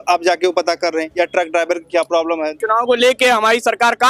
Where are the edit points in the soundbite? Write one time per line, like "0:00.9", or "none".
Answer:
0:02.6

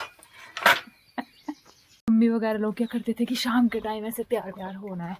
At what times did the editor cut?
0:02.1

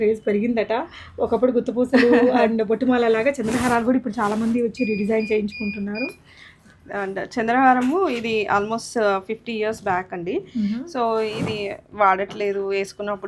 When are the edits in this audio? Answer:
none

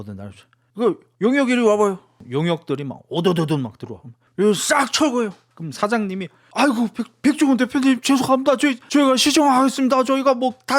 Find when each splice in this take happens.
none

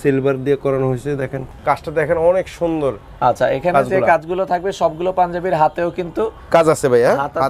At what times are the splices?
0:01.4

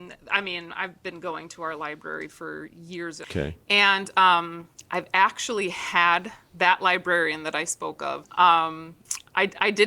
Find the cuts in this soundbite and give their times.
0:03.2
0:08.2

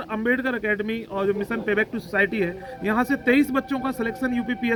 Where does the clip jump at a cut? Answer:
none

